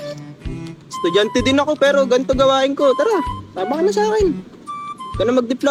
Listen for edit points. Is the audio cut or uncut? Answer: uncut